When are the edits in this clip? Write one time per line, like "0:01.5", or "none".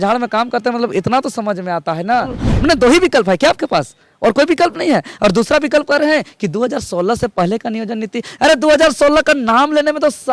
0:02.4